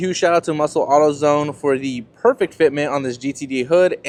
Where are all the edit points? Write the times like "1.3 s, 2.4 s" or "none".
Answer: none